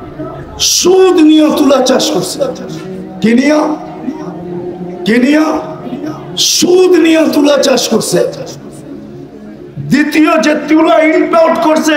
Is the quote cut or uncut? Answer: uncut